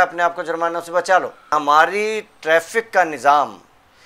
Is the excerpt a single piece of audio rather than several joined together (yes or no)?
no